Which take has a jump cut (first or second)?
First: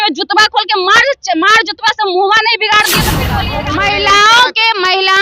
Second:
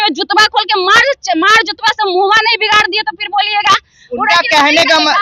first